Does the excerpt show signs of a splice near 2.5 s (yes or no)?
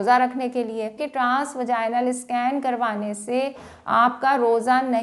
no